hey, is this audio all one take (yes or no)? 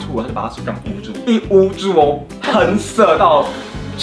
no